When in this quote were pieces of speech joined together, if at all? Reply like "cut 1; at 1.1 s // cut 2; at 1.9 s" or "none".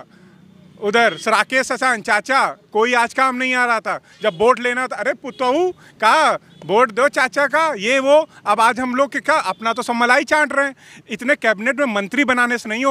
none

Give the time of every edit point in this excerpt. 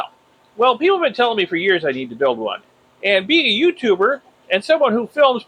cut 1; at 2.6 s

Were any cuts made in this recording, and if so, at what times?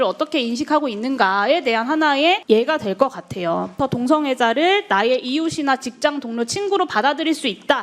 cut 1; at 2.4 s // cut 2; at 3.7 s

